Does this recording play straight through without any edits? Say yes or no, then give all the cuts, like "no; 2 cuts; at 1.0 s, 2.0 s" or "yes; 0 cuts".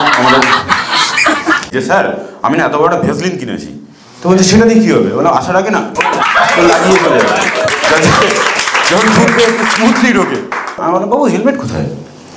no; 2 cuts; at 1.7 s, 10.8 s